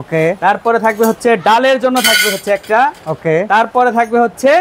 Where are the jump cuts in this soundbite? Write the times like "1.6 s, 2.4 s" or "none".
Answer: none